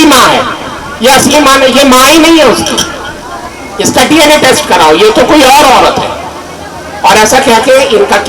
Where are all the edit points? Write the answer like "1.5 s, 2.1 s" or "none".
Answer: none